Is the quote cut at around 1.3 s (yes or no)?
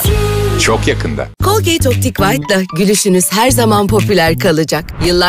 yes